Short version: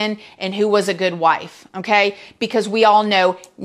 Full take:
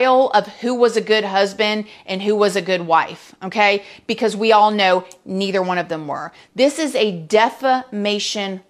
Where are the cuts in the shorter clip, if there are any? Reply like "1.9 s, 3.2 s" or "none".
none